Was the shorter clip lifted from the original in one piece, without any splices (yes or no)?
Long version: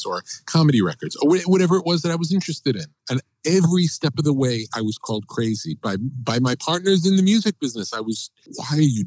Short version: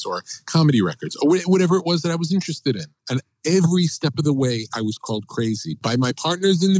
no